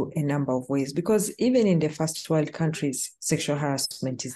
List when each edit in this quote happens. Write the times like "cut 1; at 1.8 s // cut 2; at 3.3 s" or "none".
none